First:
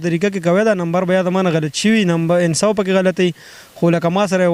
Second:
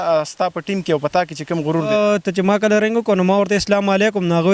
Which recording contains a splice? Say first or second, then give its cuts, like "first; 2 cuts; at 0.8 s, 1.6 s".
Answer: second; 1 cut; at 1.9 s